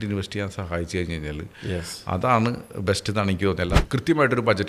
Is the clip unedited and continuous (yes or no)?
no